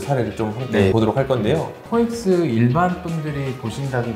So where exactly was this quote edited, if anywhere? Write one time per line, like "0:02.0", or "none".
0:01.8

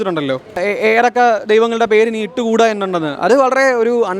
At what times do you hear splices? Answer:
0:00.9

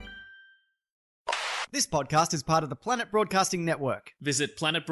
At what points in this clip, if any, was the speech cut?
0:01.3

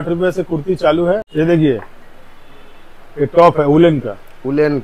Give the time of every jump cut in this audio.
0:01.3

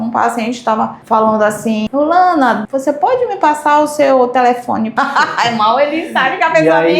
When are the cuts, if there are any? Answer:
0:01.9
0:02.7
0:04.9

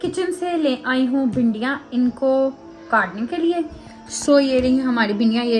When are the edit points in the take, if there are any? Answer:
none

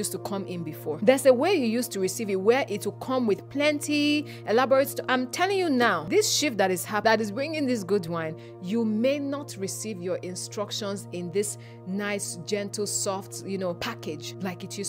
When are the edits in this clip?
0:01.0
0:05.0
0:06.0
0:07.0
0:14.0

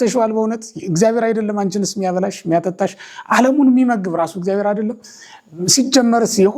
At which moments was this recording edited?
none

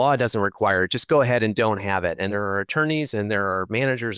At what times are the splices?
0:02.3

